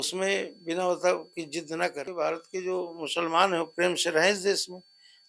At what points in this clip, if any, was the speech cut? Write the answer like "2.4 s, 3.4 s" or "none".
2.1 s